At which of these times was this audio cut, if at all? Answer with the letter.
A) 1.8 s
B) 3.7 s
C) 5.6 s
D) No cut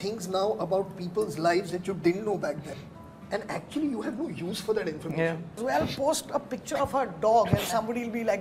C